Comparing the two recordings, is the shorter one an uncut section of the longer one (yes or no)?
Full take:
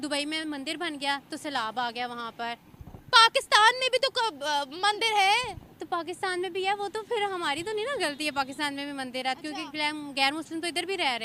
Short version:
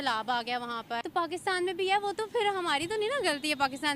no